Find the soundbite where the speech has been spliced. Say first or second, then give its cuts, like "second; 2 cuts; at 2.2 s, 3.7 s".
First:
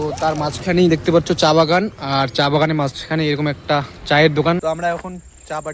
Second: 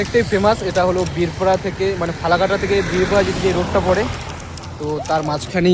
first; 1 cut; at 4.6 s